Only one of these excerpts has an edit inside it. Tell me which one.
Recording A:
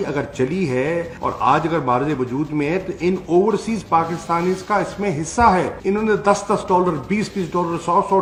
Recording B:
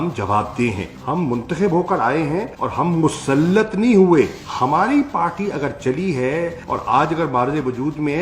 B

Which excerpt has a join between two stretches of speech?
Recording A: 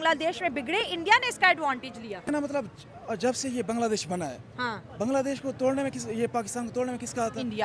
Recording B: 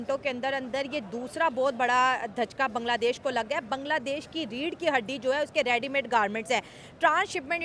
A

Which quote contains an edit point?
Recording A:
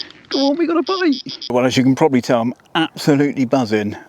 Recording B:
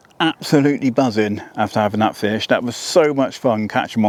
A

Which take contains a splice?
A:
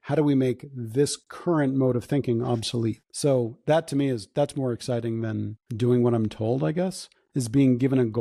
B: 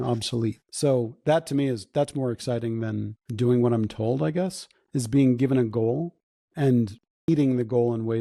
B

